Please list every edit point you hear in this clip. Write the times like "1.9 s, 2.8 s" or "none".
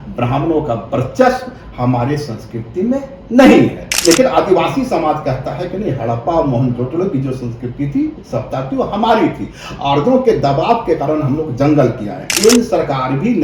3.9 s, 12.3 s